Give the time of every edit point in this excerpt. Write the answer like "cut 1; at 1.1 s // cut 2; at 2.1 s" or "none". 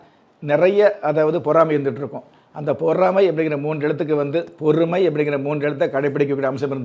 none